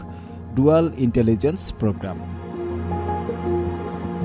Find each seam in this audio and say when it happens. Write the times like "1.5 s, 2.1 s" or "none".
none